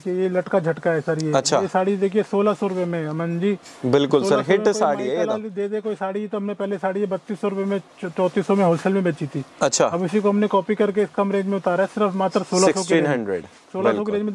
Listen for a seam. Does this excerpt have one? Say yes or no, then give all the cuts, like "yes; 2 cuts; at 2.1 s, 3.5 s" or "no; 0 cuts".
no; 0 cuts